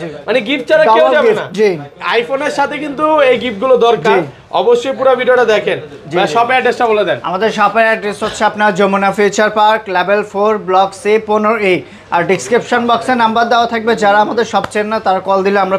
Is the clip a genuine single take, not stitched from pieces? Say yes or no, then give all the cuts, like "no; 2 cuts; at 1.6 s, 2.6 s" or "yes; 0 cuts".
yes; 0 cuts